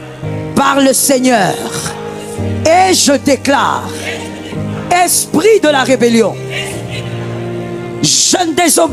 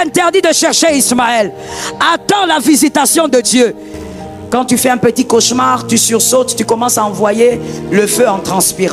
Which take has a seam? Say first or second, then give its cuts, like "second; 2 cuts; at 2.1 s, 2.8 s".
second; 1 cut; at 4.3 s